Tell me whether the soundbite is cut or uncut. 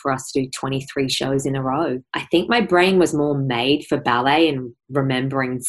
cut